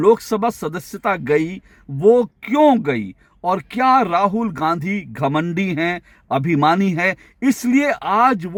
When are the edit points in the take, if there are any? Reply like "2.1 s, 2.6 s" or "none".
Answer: none